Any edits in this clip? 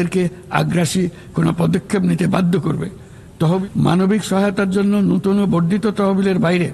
yes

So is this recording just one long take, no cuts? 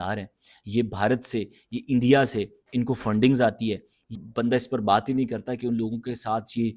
no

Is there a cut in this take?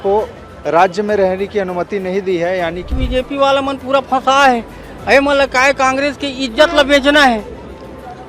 yes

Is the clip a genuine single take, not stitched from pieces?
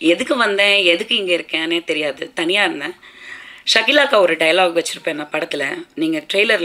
yes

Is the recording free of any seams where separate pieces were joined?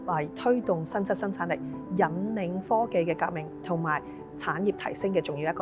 yes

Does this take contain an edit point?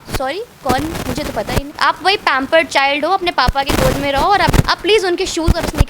yes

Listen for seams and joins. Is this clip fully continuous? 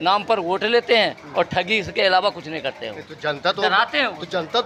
yes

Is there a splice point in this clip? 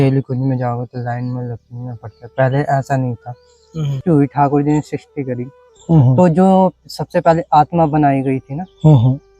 yes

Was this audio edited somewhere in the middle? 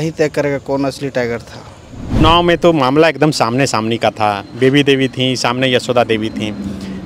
yes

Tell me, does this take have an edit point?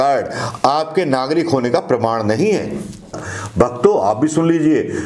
yes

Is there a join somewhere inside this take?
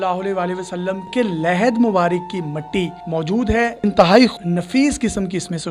yes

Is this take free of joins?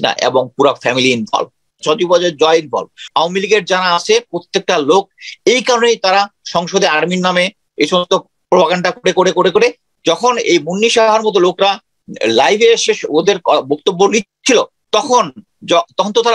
no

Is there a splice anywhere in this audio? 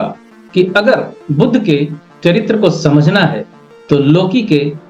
no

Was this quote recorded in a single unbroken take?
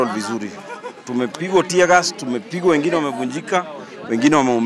yes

